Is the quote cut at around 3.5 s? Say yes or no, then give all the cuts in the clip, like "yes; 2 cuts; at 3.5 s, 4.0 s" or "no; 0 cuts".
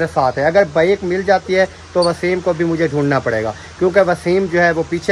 no; 0 cuts